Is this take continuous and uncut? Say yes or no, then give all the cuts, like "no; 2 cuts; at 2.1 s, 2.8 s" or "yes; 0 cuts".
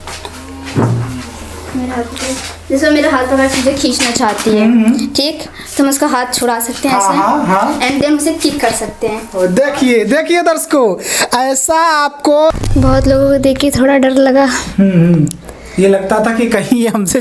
no; 1 cut; at 12.5 s